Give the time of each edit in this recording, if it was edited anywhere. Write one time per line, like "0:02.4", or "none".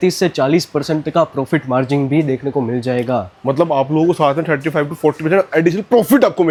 none